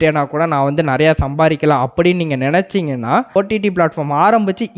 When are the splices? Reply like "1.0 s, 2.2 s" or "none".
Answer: 3.3 s